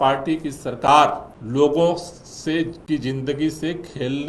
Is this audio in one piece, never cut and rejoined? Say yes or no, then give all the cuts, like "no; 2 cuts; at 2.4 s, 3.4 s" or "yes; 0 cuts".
no; 1 cut; at 1.3 s